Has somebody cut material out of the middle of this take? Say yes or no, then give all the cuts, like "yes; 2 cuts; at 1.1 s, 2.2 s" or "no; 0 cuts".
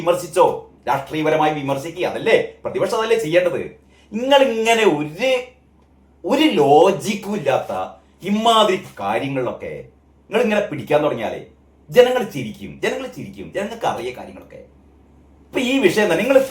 no; 0 cuts